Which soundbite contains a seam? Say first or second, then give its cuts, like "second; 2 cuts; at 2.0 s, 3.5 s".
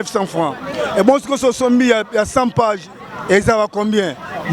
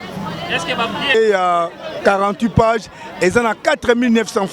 second; 1 cut; at 1.1 s